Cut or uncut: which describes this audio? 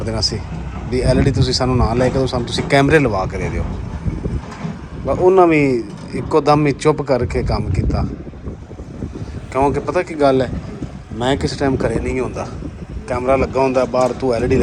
uncut